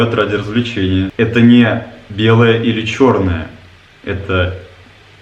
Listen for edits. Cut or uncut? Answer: cut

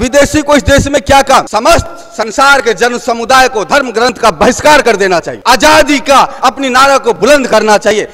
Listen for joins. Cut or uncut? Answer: cut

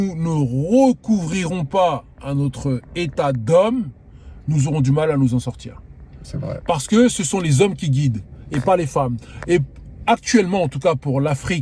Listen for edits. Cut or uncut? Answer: uncut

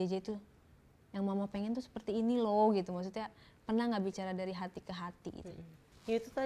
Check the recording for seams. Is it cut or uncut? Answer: uncut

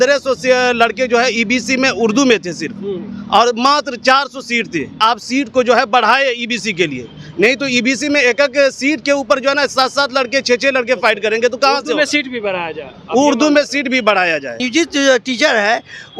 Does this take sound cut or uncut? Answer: cut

